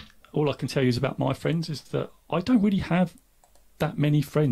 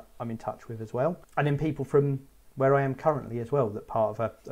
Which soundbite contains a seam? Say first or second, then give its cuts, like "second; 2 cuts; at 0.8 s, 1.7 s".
second; 1 cut; at 1.2 s